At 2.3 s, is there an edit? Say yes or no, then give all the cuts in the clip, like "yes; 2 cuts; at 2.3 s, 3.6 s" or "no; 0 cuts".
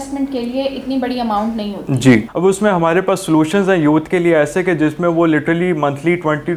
yes; 1 cut; at 2.3 s